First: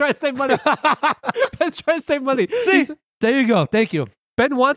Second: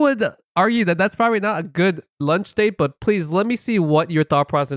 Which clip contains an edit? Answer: second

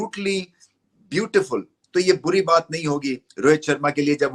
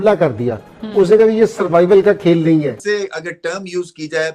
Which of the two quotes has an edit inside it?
second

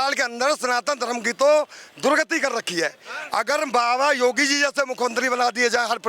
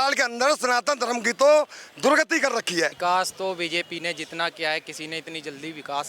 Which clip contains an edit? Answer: second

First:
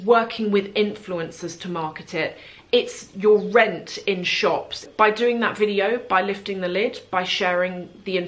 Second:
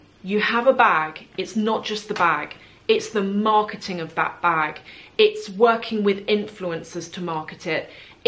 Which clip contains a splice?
first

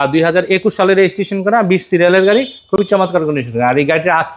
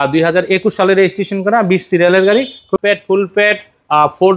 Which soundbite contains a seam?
second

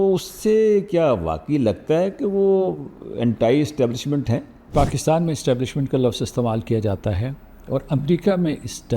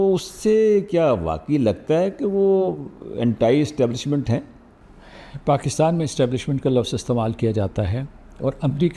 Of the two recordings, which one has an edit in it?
first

